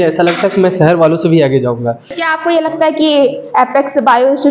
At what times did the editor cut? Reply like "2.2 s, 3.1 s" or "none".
2.2 s